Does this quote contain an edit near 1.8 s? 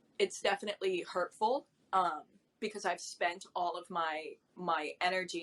no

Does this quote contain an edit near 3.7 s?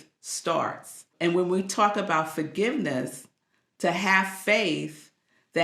no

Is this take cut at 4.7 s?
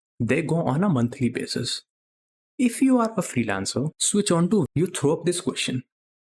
yes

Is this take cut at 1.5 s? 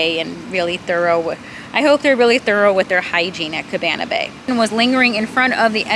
no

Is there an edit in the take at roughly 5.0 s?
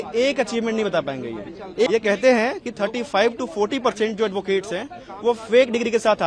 no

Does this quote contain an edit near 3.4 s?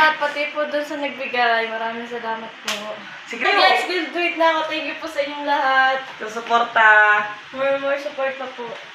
yes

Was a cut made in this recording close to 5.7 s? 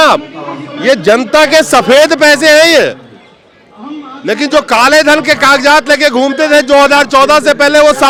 no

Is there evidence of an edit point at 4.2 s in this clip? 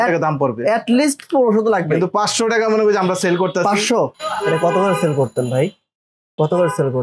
yes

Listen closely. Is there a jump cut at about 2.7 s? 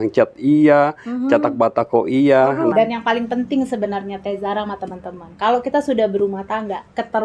yes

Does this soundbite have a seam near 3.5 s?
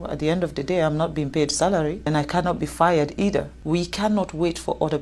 yes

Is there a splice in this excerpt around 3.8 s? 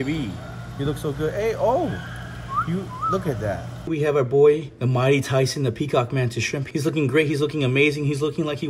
yes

